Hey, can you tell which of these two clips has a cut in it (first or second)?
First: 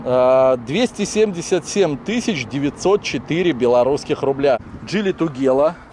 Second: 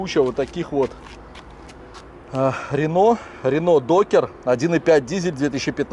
first